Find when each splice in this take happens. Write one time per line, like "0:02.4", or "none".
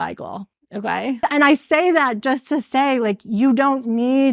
0:01.1